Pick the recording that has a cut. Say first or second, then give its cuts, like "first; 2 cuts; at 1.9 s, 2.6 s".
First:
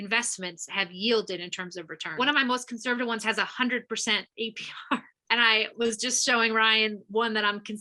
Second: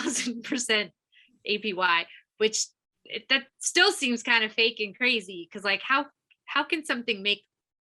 first; 2 cuts; at 2.2 s, 5.1 s